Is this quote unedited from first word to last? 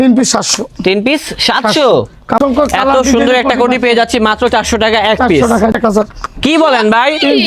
no; 2 cuts; at 2.4 s, 5.7 s

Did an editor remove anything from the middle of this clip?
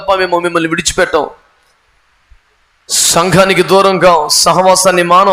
no; 0 cuts

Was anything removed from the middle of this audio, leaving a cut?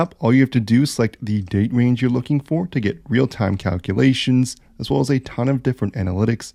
no; 0 cuts

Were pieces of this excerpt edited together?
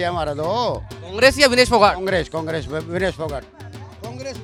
no; 0 cuts

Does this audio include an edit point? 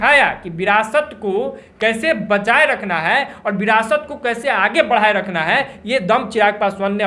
no; 0 cuts

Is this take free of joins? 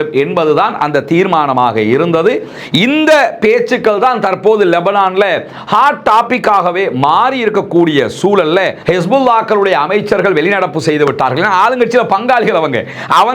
no; 1 cut; at 8.8 s

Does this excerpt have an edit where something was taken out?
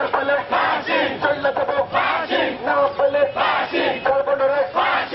no; 0 cuts

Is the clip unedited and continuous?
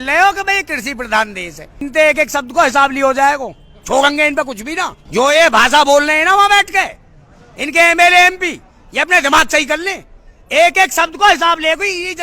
no; 2 cuts; at 1.8 s, 5.0 s

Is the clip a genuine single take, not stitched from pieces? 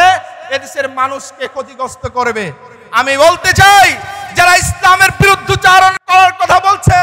no; 1 cut; at 6.0 s

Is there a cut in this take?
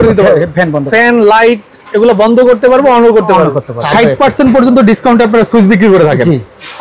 yes; 2 cuts; at 0.9 s, 3.7 s

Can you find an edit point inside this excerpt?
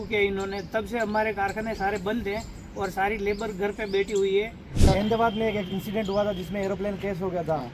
yes; 1 cut; at 4.9 s

